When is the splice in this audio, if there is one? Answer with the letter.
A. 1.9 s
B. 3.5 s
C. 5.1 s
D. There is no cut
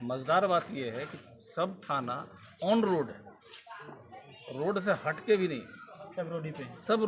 D